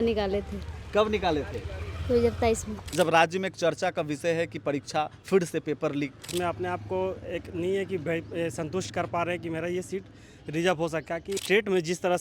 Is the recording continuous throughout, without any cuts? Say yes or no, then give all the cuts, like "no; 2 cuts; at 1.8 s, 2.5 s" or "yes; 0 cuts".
no; 3 cuts; at 2.8 s, 6.3 s, 11.4 s